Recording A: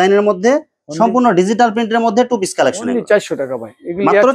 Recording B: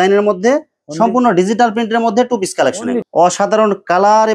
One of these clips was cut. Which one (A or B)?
B